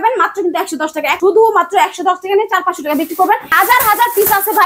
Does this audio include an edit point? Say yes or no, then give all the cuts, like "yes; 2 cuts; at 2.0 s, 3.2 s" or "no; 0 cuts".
yes; 2 cuts; at 1.2 s, 3.5 s